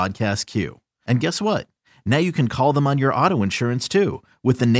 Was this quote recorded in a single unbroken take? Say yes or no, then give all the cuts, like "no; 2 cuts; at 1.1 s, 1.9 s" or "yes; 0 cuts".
yes; 0 cuts